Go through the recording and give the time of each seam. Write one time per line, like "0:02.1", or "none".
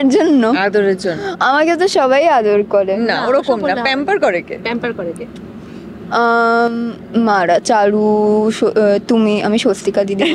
none